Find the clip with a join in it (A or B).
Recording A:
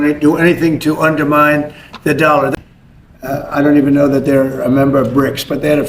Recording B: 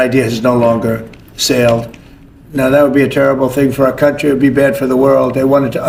A